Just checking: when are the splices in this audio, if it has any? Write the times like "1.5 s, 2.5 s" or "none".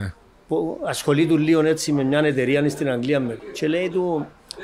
3.4 s